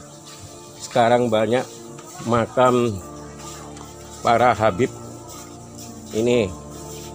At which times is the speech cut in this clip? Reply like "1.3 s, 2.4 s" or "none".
none